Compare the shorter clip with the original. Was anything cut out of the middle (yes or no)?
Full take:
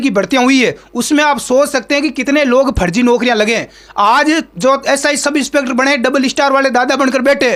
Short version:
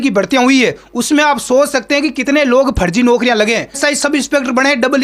yes